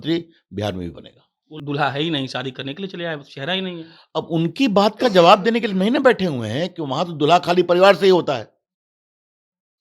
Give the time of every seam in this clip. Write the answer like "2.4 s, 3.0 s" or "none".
1.5 s